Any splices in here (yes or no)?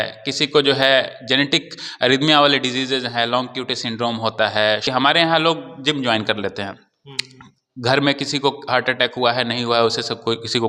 yes